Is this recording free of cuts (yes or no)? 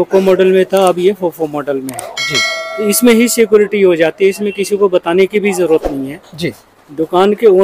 yes